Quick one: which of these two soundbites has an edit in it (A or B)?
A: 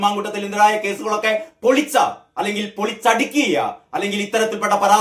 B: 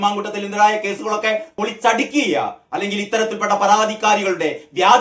B